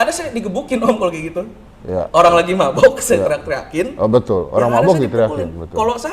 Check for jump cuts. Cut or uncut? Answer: uncut